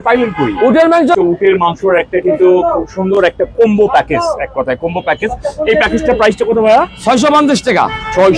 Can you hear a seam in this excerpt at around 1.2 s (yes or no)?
yes